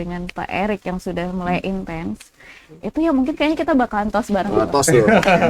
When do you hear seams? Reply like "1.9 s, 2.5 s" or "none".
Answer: none